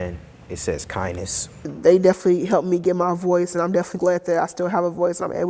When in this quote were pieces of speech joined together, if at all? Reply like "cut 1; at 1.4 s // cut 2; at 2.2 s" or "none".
cut 1; at 1.7 s